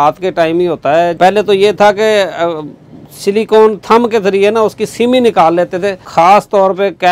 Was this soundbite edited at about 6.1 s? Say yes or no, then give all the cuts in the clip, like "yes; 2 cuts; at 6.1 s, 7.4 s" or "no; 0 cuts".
yes; 2 cuts; at 1.1 s, 6.1 s